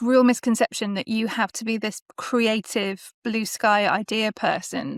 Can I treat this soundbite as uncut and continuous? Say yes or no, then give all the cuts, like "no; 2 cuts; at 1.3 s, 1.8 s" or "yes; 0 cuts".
yes; 0 cuts